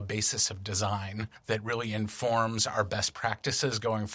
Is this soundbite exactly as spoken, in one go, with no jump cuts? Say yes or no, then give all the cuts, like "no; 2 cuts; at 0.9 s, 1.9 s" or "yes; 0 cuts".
no; 1 cut; at 1.3 s